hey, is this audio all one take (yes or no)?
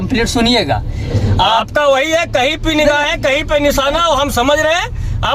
yes